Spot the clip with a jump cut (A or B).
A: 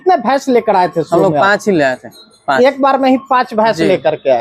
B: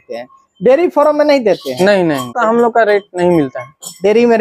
B